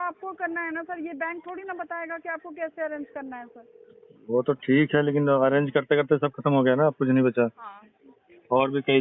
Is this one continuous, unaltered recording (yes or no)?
yes